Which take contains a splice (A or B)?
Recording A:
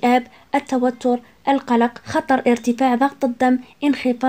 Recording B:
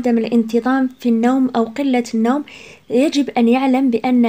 A